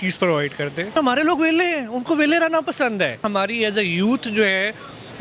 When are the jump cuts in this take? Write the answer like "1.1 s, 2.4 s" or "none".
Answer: 0.9 s, 3.2 s